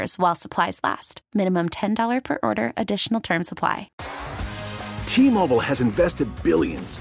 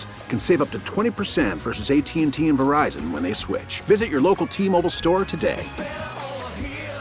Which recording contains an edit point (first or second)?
first